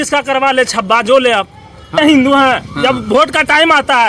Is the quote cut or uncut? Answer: cut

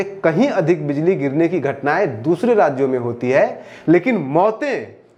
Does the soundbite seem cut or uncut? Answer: uncut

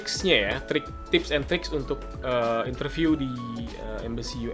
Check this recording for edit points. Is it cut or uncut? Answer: uncut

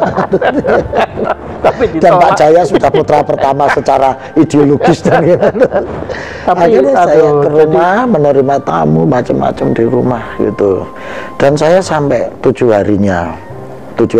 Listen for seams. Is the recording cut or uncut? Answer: uncut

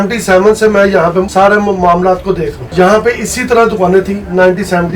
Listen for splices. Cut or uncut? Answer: cut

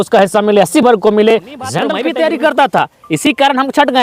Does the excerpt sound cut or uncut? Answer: cut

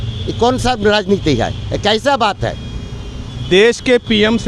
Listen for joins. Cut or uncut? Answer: uncut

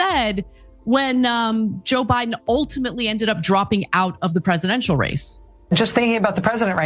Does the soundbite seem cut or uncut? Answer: uncut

